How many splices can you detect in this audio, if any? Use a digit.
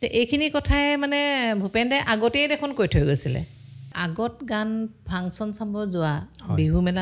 1